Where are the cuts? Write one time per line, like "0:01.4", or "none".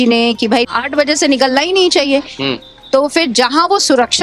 none